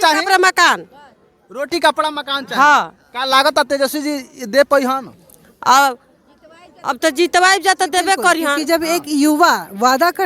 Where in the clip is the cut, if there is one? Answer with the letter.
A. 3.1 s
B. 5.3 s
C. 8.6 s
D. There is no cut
C